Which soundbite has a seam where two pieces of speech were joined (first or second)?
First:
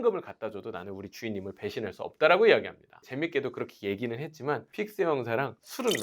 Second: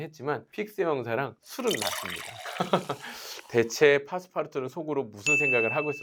first